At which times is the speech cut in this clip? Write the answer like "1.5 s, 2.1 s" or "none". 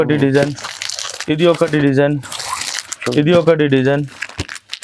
none

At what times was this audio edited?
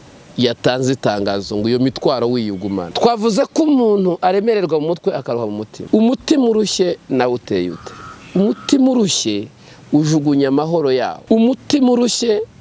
2.9 s, 5.7 s, 11.2 s

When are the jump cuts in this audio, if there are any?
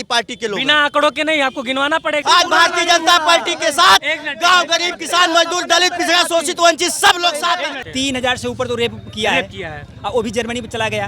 2.2 s, 7.8 s

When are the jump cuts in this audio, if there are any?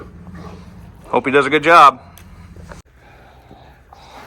2.8 s

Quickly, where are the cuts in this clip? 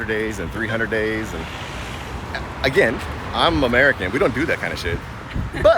none

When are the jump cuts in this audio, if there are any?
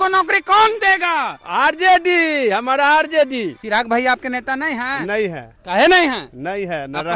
3.6 s

